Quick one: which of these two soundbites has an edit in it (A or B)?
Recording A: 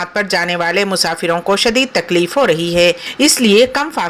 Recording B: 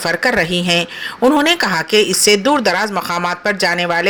A